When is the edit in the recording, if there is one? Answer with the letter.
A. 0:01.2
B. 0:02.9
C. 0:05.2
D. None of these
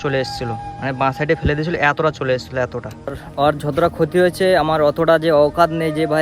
B